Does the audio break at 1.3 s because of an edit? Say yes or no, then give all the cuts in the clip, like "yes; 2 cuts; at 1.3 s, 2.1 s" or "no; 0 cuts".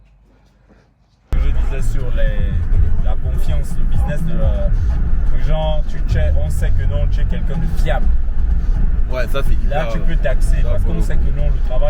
yes; 1 cut; at 1.3 s